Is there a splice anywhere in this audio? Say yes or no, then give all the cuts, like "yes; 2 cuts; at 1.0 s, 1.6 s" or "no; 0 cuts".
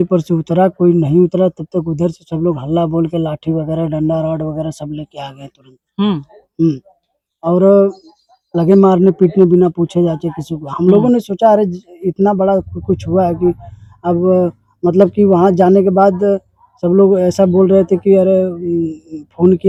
no; 0 cuts